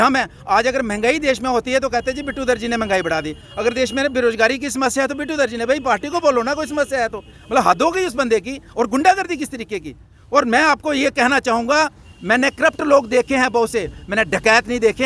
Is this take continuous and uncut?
yes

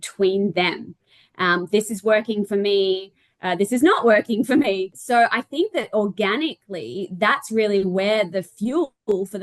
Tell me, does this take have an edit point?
no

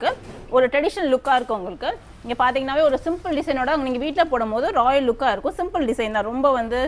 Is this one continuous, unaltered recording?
yes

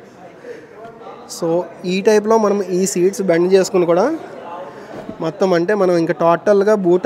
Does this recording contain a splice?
no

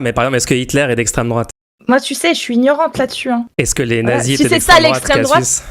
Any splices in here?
yes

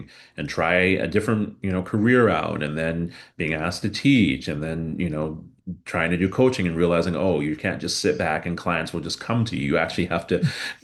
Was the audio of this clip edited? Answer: no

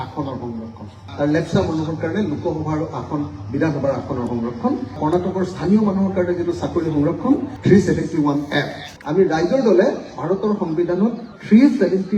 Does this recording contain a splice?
yes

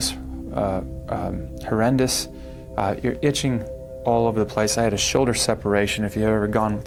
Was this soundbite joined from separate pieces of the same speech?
no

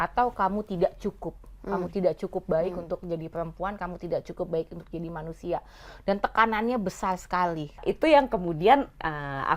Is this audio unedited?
no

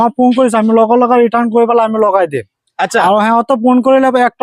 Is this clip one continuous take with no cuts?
yes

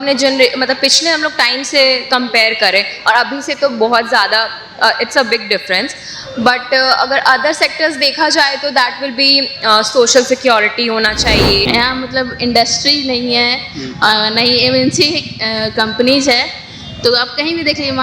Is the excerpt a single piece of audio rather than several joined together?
no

